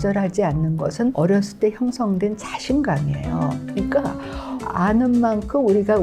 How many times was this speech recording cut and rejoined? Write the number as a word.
one